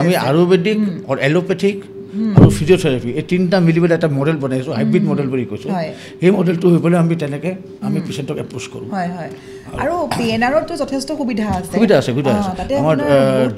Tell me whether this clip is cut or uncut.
uncut